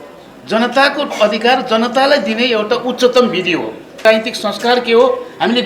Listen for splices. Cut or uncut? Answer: cut